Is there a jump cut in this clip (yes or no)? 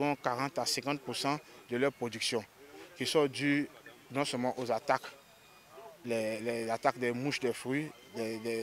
no